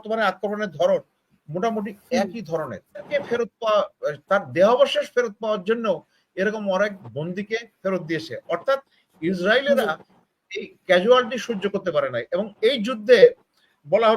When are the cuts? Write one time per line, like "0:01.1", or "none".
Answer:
0:03.1